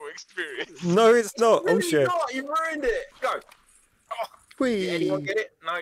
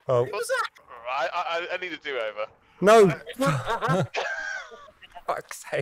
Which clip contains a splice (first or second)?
first